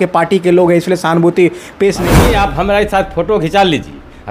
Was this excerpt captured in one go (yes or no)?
no